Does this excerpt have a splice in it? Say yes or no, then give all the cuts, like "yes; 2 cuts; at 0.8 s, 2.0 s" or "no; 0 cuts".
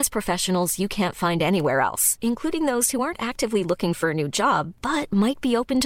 no; 0 cuts